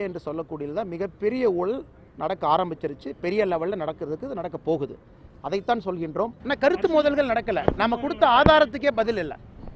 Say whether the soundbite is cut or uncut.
cut